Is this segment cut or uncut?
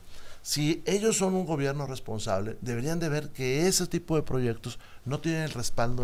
uncut